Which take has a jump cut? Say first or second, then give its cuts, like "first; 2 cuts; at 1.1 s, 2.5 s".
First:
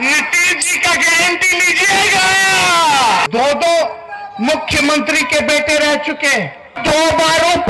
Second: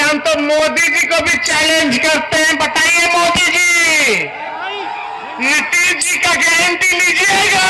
first; 2 cuts; at 3.3 s, 6.8 s